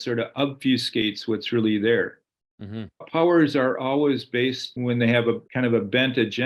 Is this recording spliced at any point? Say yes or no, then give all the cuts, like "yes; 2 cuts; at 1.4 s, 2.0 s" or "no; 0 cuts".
yes; 3 cuts; at 3.1 s, 4.8 s, 5.4 s